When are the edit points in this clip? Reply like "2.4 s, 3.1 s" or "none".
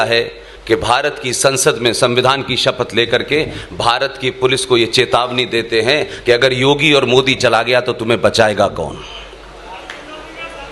none